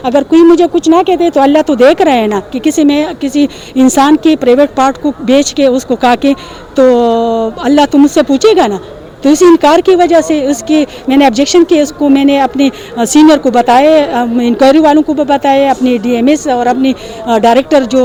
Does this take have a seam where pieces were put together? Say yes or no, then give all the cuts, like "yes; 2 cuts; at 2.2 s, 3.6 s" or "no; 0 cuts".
no; 0 cuts